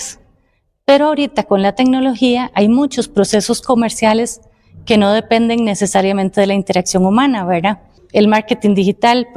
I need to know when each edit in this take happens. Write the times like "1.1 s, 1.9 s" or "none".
8.0 s